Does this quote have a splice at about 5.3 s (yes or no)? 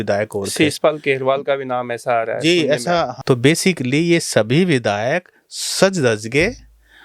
no